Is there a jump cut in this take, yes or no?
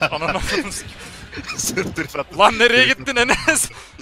no